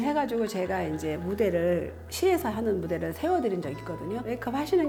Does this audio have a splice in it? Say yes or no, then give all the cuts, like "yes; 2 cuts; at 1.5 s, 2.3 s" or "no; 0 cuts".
no; 0 cuts